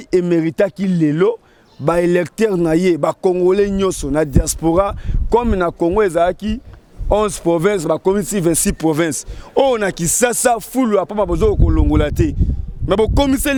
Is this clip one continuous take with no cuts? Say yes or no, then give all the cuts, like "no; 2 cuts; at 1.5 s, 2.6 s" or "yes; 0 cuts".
yes; 0 cuts